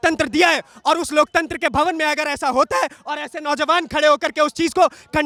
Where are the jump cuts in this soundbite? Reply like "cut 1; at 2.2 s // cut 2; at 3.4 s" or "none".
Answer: none